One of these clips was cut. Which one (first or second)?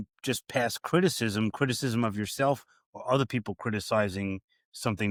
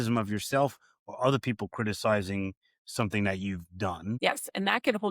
second